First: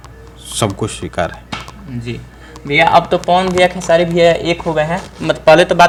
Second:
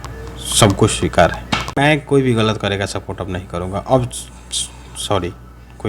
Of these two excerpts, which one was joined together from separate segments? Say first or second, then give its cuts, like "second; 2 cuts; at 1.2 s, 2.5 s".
second; 1 cut; at 1.8 s